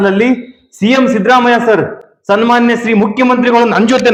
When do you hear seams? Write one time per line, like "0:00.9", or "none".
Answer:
none